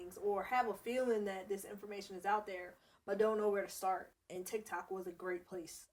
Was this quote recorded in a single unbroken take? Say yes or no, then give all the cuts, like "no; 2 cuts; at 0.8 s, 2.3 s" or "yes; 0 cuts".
yes; 0 cuts